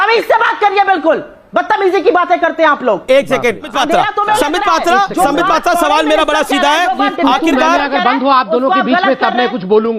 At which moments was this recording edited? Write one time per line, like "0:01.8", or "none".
0:03.7